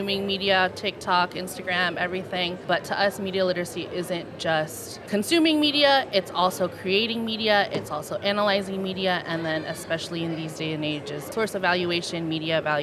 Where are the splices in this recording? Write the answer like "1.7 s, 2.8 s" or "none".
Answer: 2.6 s, 4.9 s, 11.3 s